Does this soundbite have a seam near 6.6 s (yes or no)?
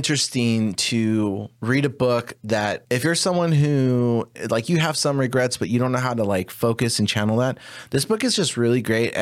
no